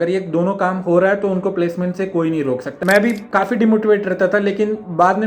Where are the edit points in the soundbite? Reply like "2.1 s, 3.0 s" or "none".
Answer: 2.7 s